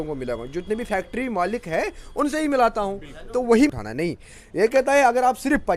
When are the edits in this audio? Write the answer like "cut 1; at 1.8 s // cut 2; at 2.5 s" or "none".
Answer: cut 1; at 3.7 s

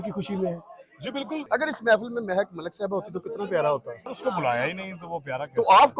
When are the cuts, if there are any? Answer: cut 1; at 1.4 s // cut 2; at 4.0 s

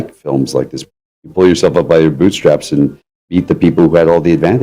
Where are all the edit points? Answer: cut 1; at 1.1 s // cut 2; at 3.3 s

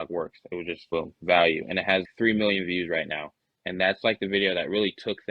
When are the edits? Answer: none

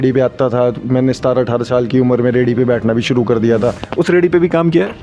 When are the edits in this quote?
cut 1; at 3.8 s

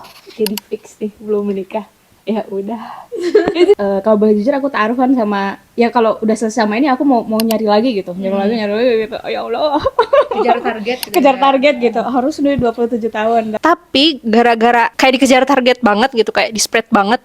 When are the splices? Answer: cut 1; at 3.8 s // cut 2; at 13.5 s

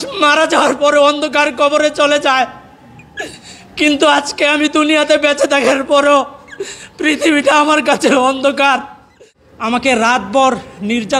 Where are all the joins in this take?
cut 1; at 9.7 s

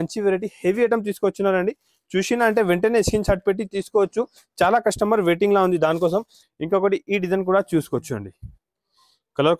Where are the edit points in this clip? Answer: cut 1; at 6.4 s

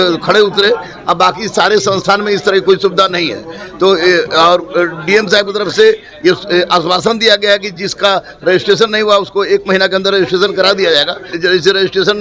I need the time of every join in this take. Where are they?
cut 1; at 11.3 s

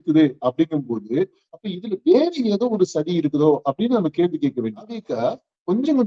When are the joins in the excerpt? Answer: cut 1; at 5.1 s

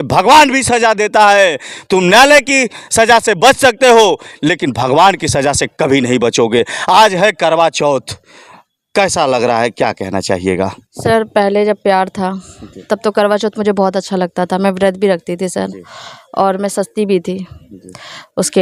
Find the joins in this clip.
none

